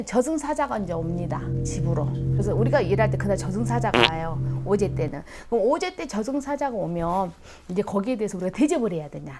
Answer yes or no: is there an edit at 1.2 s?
no